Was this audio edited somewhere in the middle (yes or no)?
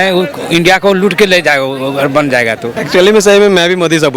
yes